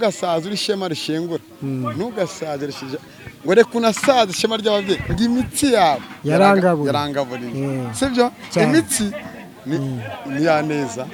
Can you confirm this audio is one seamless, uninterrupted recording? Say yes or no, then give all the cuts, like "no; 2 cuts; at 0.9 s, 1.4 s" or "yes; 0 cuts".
yes; 0 cuts